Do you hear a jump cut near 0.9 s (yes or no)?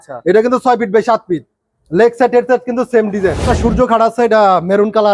no